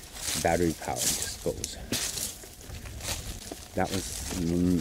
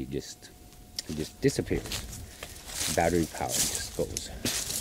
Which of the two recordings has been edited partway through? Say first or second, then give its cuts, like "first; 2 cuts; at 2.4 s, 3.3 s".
first; 1 cut; at 3.3 s